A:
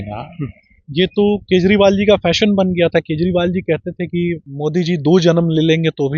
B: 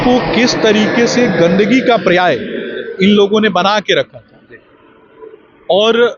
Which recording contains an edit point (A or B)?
A